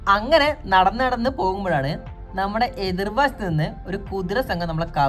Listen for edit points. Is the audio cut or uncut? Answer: uncut